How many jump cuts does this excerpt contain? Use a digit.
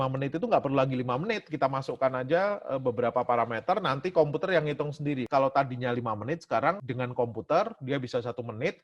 2